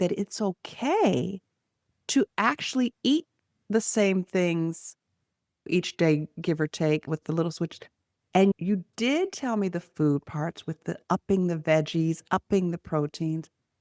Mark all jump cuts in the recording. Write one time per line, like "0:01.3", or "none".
0:07.1
0:08.5